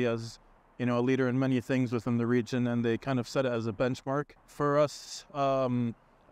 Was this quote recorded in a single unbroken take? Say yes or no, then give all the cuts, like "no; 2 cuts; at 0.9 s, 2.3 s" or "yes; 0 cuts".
no; 1 cut; at 4.4 s